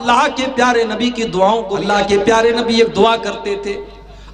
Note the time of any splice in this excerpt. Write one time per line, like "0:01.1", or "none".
0:01.9